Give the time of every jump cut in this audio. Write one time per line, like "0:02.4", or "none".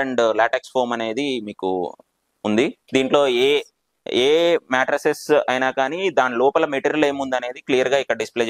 none